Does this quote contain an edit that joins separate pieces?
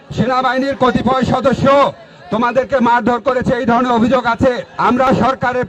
yes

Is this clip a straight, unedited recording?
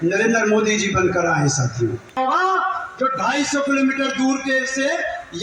no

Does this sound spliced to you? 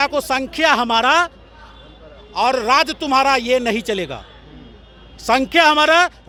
no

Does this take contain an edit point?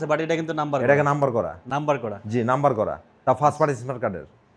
no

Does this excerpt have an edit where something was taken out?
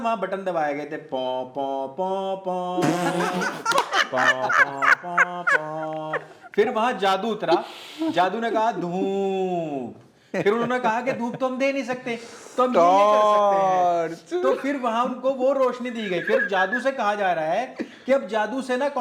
no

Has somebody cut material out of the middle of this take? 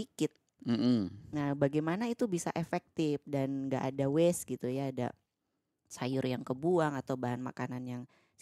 no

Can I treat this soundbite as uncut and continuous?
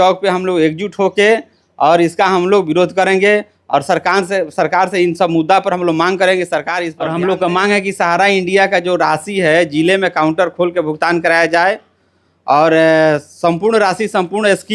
no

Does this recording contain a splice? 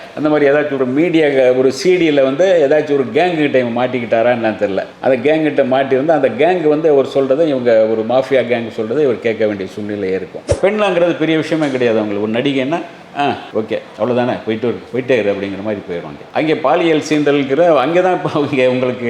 yes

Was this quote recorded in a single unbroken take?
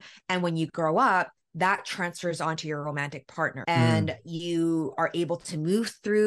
yes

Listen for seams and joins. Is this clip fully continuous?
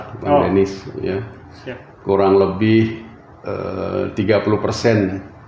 yes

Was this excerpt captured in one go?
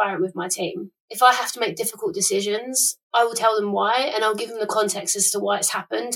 yes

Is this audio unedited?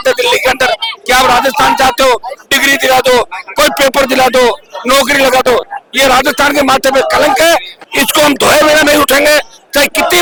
yes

